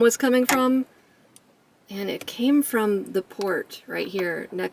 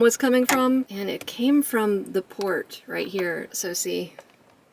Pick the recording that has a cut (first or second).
second